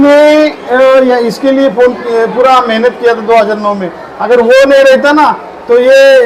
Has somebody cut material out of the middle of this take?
no; 0 cuts

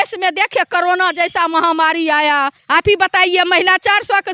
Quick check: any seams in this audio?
yes; 1 cut; at 2.6 s

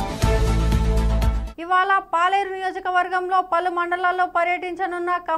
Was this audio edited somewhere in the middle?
yes; 1 cut; at 1.4 s

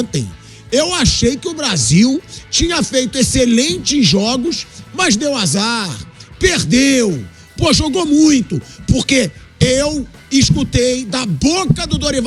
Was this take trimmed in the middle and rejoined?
no; 0 cuts

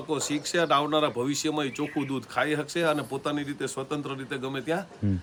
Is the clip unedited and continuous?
yes; 0 cuts

